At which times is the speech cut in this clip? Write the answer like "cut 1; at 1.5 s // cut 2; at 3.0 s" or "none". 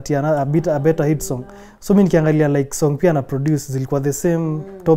none